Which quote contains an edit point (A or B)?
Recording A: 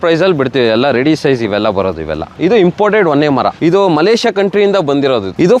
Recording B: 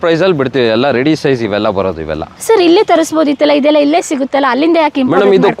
A